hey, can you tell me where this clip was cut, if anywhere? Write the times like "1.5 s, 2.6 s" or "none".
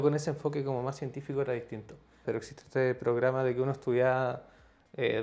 2.2 s